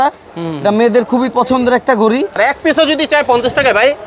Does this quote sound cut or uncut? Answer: cut